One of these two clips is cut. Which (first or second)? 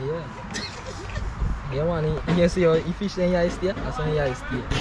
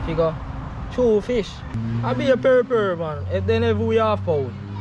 second